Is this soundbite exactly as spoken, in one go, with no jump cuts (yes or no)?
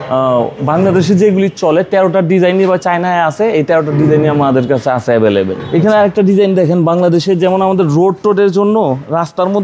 no